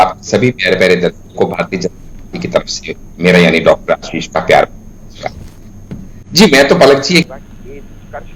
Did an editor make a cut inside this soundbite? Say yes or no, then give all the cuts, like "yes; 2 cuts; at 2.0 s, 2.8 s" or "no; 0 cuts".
no; 0 cuts